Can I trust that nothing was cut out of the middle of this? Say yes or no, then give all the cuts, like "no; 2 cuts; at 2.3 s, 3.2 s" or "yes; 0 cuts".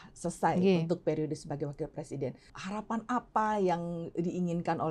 no; 1 cut; at 2.5 s